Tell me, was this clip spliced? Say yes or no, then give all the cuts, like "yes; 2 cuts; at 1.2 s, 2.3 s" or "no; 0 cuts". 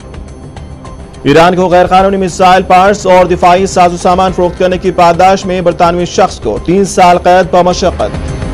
yes; 1 cut; at 0.9 s